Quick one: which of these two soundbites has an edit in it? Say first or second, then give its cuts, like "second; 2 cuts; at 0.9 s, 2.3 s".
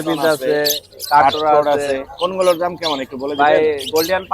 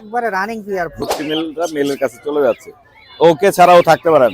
second; 1 cut; at 1.0 s